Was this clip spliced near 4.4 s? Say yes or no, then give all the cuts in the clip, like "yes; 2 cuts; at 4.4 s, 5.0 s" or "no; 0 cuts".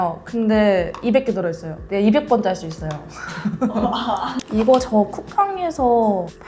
yes; 1 cut; at 4.4 s